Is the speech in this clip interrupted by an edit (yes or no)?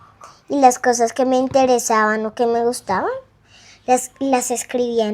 no